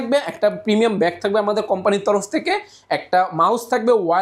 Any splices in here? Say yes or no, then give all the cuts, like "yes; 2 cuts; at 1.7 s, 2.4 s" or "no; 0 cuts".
no; 0 cuts